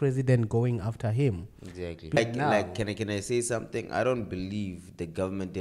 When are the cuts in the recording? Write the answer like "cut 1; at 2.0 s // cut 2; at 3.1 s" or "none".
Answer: cut 1; at 2.1 s